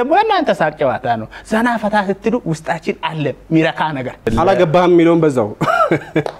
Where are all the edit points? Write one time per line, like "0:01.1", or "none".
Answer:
0:04.2